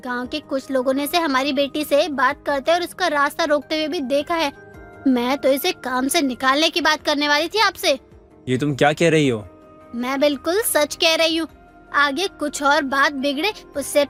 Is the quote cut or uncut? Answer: uncut